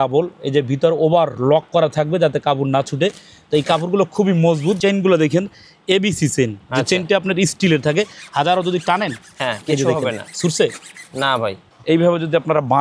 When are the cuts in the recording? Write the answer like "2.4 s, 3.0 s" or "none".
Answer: 4.8 s, 11.6 s